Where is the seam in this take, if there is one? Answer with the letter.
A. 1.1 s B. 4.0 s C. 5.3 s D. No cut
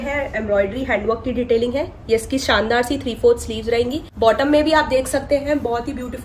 B